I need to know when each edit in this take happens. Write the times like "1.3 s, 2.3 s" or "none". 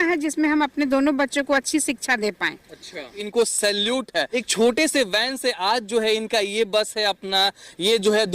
3.2 s, 4.4 s